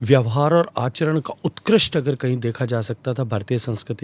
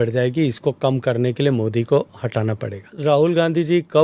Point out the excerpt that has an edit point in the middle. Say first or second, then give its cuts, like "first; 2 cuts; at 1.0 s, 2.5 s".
second; 1 cut; at 2.9 s